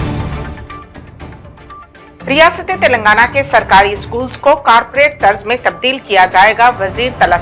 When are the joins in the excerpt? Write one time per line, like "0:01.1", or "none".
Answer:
0:02.0